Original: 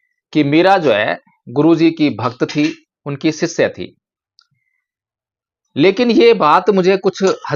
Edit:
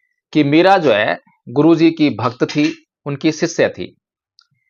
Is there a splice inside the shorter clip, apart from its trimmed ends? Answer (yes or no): no